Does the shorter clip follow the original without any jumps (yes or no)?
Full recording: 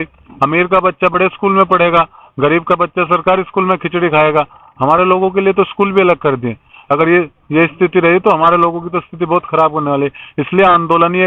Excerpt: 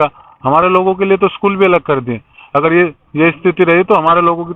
yes